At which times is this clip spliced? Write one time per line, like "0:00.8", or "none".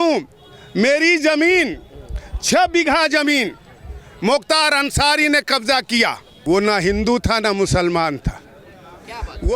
0:06.3